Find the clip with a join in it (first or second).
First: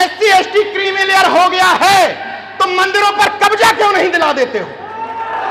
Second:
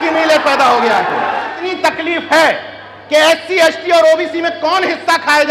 second